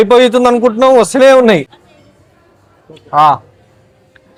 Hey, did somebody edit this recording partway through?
no; 0 cuts

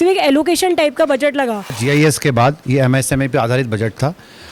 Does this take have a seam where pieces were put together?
yes; 1 cut; at 1.8 s

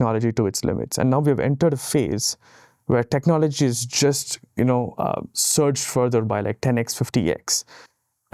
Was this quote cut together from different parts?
no; 0 cuts

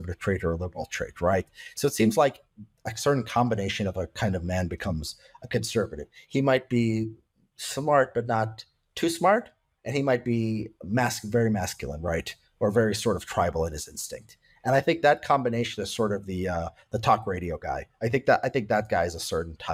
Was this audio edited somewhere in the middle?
no; 0 cuts

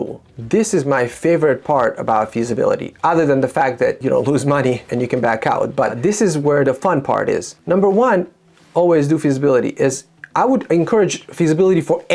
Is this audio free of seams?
no; 4 cuts; at 4.0 s, 4.9 s, 6.0 s, 7.5 s

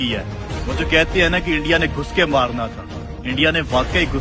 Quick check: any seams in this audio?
no; 0 cuts

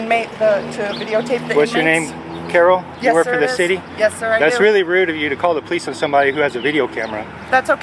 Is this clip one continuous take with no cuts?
yes; 0 cuts

